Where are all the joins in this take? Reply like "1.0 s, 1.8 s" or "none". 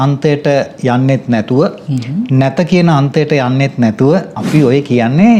4.4 s

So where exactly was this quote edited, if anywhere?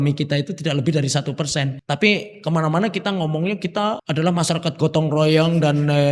1.8 s, 4.0 s

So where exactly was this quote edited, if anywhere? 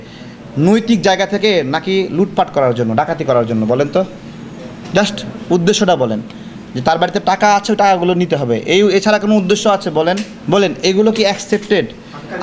10.3 s

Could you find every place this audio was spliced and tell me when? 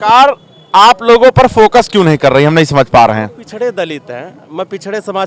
none

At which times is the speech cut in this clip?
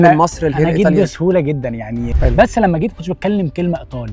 2.1 s

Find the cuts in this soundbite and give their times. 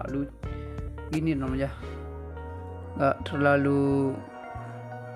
4.2 s

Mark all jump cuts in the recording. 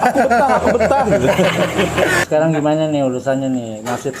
2.2 s

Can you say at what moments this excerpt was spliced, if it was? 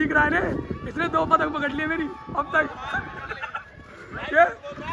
none

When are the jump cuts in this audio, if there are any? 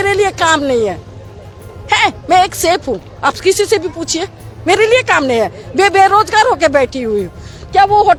none

